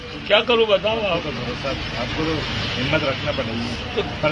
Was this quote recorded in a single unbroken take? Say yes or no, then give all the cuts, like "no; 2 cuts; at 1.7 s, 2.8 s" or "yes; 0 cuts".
yes; 0 cuts